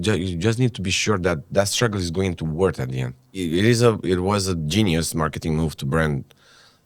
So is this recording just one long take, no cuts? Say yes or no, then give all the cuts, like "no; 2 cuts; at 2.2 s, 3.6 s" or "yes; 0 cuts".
no; 1 cut; at 3.2 s